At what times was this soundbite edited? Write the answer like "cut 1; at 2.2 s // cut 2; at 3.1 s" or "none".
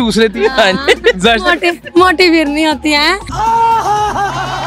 cut 1; at 3.2 s